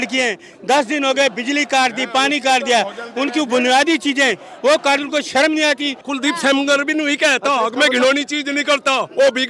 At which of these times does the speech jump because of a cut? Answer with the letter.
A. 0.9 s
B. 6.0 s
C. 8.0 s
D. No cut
B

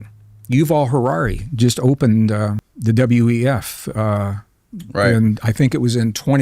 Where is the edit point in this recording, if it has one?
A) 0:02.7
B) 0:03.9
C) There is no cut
A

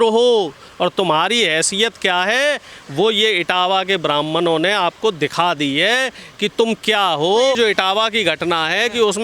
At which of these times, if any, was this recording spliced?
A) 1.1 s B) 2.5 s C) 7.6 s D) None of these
C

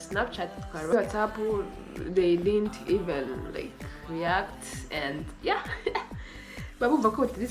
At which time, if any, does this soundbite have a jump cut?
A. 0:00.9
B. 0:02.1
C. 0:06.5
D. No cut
A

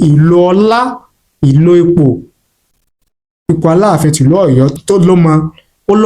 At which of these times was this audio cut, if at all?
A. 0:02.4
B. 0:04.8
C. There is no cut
B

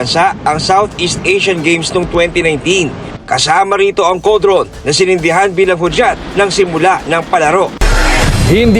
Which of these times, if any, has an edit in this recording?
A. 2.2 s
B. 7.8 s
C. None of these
B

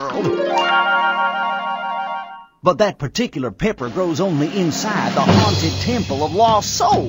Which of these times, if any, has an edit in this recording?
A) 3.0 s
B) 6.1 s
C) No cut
A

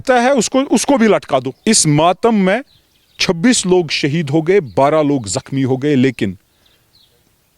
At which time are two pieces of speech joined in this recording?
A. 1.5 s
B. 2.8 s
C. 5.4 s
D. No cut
A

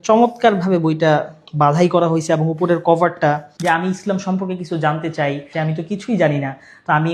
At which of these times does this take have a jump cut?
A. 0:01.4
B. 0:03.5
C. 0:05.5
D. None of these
B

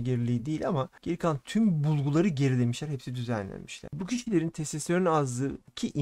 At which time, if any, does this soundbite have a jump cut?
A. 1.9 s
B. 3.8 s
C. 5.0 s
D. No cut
B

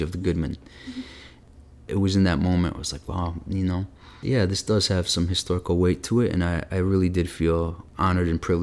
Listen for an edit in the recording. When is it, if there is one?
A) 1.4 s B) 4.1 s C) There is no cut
A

